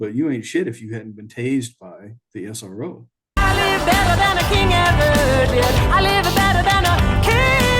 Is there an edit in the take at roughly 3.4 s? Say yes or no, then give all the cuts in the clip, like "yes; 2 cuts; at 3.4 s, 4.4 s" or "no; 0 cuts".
yes; 1 cut; at 3.4 s